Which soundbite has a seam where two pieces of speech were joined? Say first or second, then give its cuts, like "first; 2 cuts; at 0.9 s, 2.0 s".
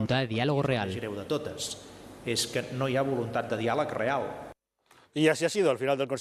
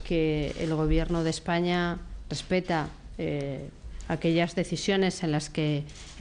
second; 1 cut; at 2.4 s